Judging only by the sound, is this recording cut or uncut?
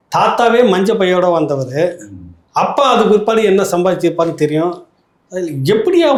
uncut